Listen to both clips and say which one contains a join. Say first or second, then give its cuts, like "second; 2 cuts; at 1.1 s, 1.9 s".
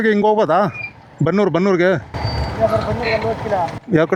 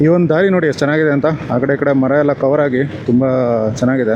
second; 1 cut; at 3.0 s